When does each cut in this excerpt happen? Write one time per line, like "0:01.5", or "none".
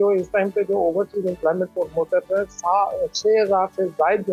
none

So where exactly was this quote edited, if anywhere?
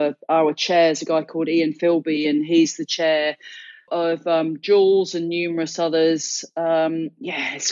0:03.9

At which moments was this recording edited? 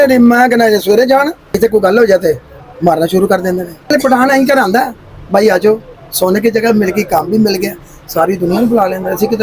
0:01.6

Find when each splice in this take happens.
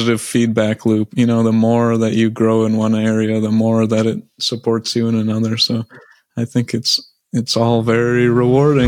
none

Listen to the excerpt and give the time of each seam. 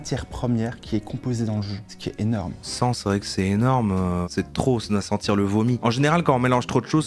0:02.6
0:04.2
0:05.8

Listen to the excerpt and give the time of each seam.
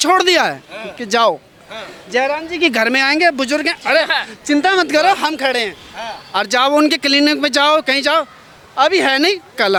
none

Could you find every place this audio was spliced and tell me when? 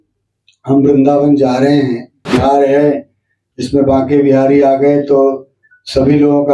0:02.3

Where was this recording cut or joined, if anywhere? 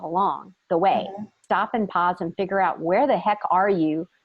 0:01.4

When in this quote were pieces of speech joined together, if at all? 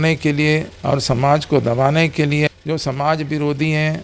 0:02.5

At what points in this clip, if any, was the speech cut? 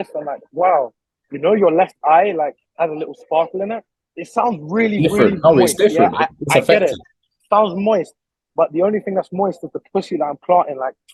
none

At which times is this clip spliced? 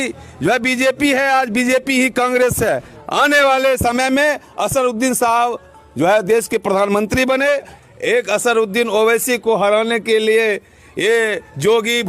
0:02.9
0:07.7

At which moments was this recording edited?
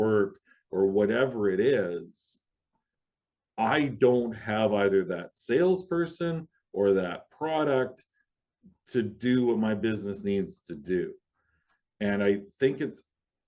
none

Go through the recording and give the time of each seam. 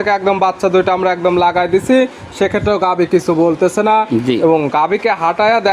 none

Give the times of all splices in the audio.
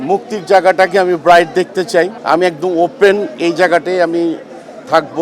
0:02.2

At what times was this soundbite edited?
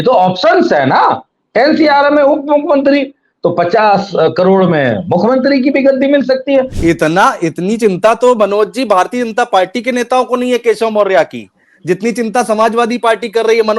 0:06.7

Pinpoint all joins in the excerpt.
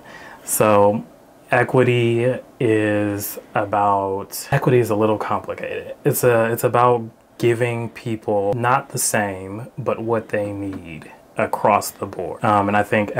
0:04.5
0:08.5
0:12.3

